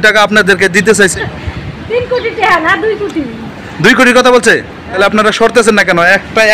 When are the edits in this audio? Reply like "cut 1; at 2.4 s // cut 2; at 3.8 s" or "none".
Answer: cut 1; at 1.1 s // cut 2; at 5.0 s